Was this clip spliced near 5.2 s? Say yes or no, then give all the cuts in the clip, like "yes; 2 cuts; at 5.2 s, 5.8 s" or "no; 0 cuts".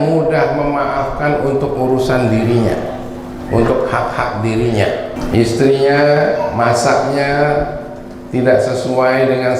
yes; 1 cut; at 5.2 s